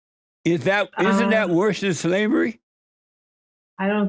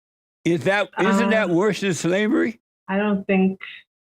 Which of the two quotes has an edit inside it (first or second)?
second